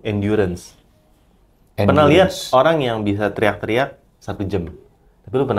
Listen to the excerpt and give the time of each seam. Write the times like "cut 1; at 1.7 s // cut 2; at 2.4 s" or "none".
none